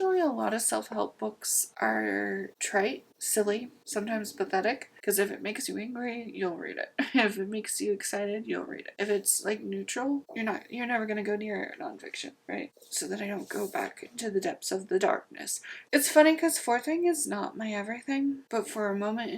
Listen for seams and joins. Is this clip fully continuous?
no; 3 cuts; at 4.9 s, 12.7 s, 15.8 s

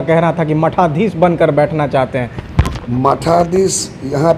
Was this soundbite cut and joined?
no; 0 cuts

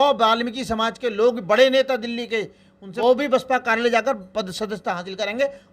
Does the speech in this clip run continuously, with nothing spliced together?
no; 1 cut; at 2.8 s

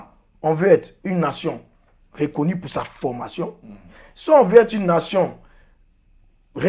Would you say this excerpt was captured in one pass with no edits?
yes; 0 cuts

